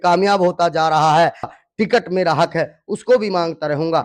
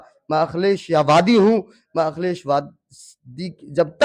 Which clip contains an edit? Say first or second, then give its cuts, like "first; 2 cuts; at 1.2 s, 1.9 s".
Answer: first; 1 cut; at 1.5 s